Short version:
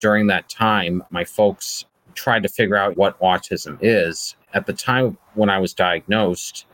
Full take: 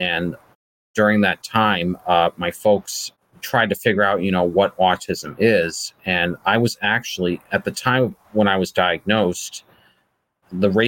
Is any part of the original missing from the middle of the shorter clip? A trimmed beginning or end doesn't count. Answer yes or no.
yes